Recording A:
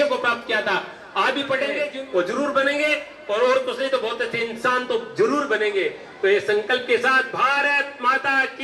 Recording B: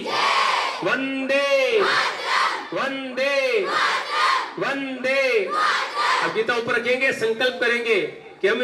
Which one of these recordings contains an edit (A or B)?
A